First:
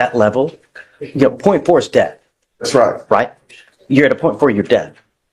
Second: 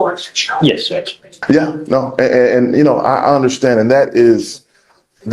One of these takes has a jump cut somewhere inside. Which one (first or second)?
second